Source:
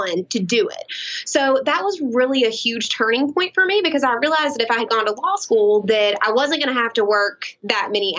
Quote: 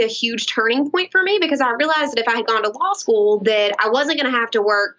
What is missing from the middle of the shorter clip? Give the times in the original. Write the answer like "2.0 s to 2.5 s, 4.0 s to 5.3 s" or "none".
none